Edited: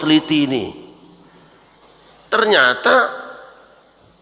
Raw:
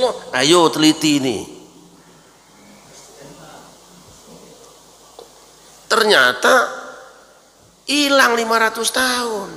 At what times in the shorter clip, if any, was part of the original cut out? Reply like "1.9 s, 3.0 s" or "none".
1.8 s